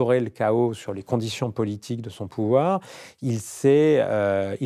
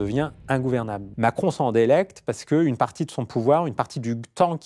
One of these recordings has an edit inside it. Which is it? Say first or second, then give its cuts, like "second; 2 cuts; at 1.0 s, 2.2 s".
second; 1 cut; at 1.0 s